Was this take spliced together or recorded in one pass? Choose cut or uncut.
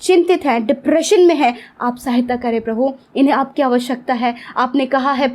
uncut